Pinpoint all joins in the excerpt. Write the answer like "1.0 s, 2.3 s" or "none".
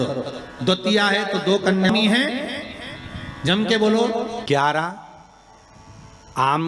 1.9 s, 4.4 s